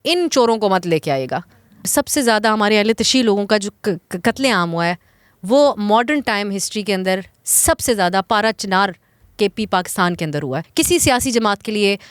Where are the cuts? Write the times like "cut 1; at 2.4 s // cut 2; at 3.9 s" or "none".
cut 1; at 1.9 s // cut 2; at 10.6 s